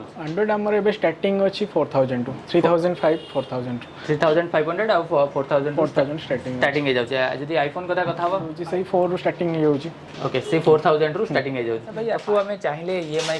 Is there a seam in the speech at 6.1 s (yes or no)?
no